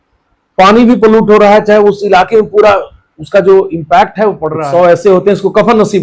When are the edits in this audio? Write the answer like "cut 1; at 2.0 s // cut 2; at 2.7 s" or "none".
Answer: cut 1; at 4.5 s